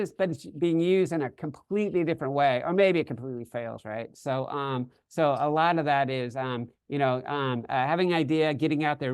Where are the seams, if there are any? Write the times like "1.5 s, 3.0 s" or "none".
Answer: none